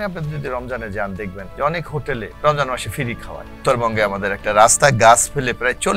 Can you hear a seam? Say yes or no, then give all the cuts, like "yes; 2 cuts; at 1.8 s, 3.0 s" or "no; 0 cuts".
yes; 3 cuts; at 1.4 s, 2.3 s, 3.6 s